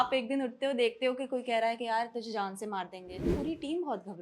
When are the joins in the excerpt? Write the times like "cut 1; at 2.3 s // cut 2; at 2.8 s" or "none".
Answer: cut 1; at 3.3 s

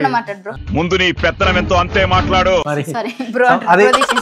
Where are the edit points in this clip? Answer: none

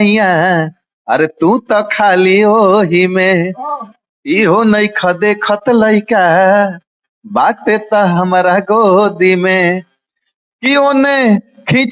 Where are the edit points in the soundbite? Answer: none

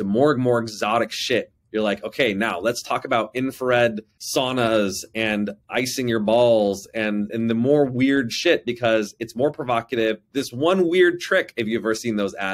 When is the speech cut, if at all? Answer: none

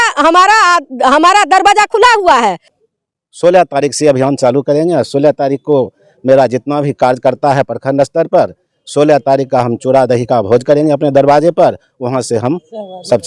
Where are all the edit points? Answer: cut 1; at 2.7 s

